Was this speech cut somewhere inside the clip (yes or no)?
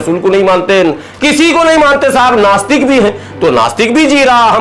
no